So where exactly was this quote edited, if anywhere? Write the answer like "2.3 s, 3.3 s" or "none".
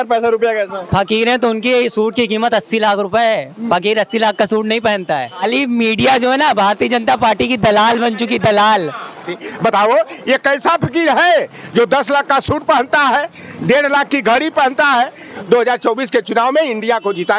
5.4 s, 9.3 s, 15.3 s

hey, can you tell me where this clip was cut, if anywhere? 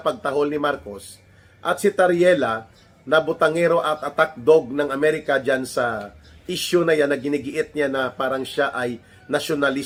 none

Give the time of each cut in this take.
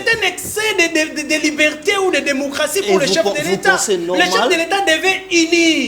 none

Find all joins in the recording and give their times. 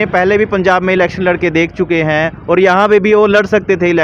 none

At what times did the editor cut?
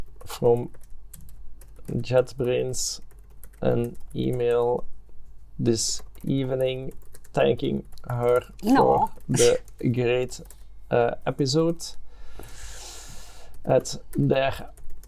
none

